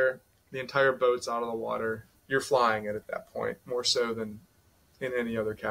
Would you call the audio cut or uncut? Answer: cut